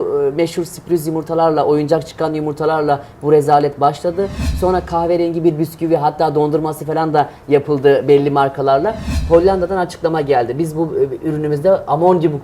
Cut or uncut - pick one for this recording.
uncut